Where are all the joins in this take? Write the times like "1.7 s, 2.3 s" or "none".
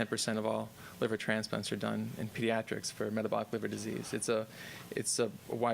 3.9 s